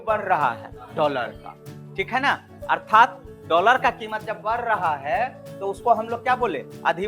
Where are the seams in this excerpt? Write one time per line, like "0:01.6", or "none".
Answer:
none